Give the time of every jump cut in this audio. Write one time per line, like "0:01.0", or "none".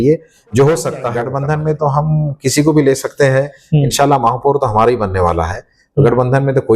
0:01.1